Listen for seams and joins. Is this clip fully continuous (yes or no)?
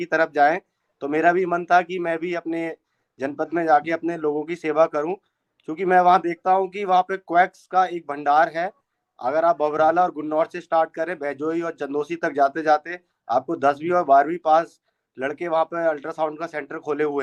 yes